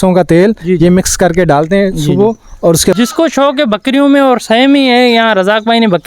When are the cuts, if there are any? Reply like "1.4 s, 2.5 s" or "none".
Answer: 3.0 s